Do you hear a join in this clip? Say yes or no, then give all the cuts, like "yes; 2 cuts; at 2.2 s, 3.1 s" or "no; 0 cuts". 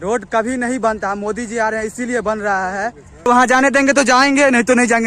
yes; 1 cut; at 3.3 s